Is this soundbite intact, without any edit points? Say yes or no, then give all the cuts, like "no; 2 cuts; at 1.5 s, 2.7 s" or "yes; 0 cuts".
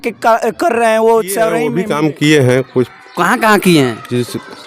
no; 1 cut; at 1.7 s